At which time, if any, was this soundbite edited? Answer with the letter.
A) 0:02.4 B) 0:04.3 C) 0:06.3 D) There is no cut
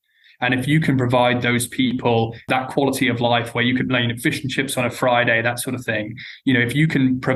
D